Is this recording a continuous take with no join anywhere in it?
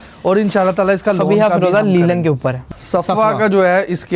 no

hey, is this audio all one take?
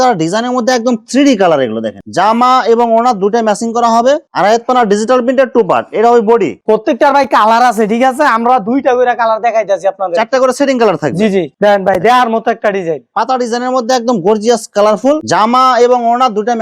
no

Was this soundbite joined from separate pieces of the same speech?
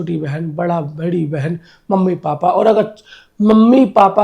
no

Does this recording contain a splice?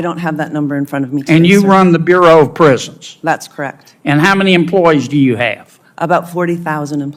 no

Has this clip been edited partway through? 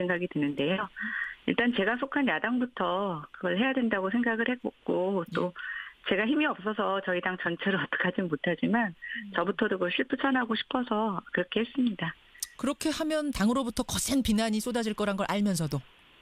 yes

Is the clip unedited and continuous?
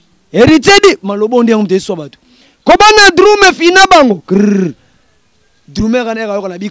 no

